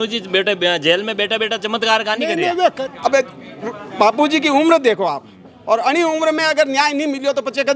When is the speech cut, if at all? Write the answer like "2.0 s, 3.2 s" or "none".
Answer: 2.6 s